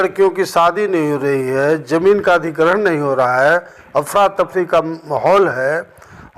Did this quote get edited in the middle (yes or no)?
no